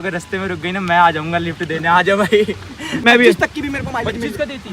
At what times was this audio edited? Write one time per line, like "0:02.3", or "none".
0:02.9